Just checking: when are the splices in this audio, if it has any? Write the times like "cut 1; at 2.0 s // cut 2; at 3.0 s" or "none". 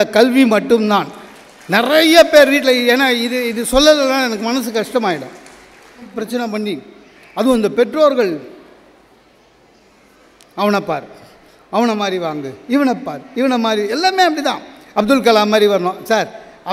cut 1; at 6.1 s